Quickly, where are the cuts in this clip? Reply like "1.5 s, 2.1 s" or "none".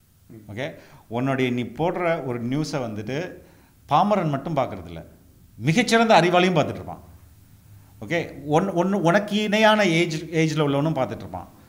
none